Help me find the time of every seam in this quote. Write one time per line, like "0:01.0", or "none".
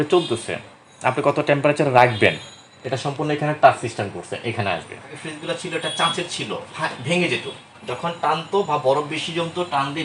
0:05.3